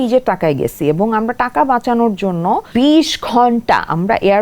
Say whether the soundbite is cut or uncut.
cut